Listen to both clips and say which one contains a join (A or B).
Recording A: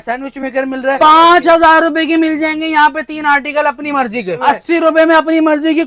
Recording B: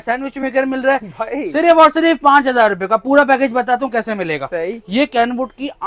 A